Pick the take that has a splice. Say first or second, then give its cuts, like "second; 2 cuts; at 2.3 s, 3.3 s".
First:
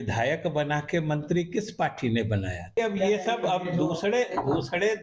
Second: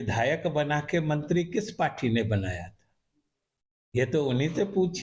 first; 1 cut; at 2.7 s